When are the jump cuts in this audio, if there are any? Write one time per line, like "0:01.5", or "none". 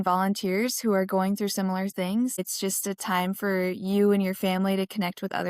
0:02.4